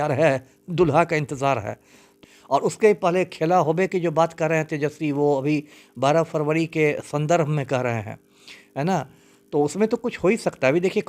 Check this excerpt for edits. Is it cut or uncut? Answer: cut